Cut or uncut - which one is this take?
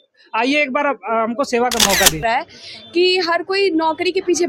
cut